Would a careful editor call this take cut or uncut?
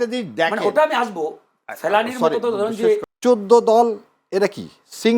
cut